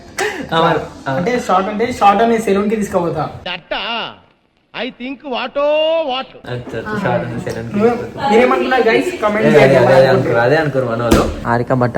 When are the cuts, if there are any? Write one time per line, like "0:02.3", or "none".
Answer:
none